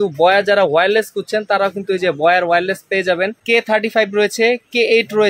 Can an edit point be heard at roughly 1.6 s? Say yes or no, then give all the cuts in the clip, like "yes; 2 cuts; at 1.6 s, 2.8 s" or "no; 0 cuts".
no; 1 cut; at 3.4 s